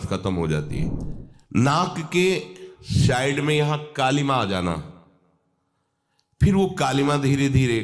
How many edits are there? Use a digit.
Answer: 1